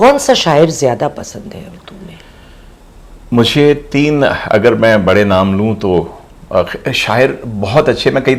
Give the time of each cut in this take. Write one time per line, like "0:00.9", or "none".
none